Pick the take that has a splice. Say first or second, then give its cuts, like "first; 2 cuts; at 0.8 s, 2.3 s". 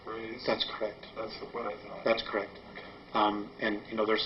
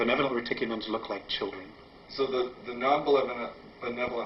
first; 1 cut; at 3.1 s